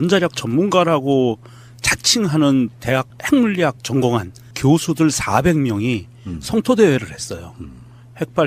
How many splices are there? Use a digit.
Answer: 1